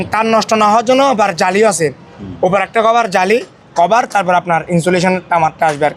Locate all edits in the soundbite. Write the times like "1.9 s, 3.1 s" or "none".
none